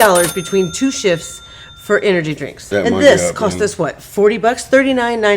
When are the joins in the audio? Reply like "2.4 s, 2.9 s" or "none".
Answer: 2.7 s